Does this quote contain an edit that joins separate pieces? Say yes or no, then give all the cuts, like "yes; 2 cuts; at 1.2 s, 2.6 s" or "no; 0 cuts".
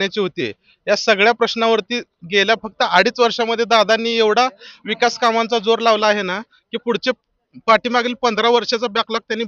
no; 0 cuts